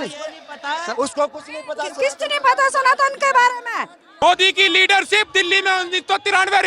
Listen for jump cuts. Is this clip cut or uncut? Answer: cut